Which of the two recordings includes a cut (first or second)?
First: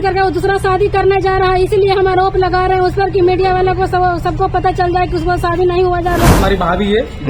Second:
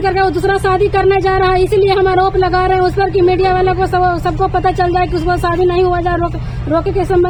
first